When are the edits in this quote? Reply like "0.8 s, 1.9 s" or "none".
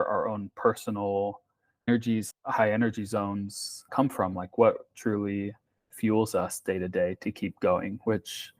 2.3 s, 3.9 s